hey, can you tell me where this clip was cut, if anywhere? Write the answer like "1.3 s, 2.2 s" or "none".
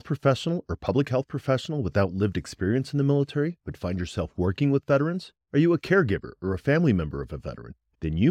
none